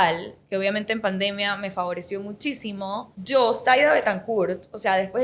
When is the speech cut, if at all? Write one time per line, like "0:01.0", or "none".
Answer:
0:03.1